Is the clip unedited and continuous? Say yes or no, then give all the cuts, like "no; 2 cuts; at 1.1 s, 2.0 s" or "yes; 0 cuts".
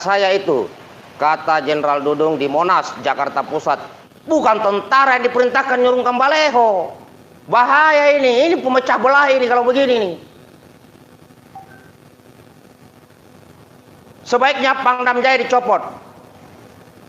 no; 1 cut; at 3.9 s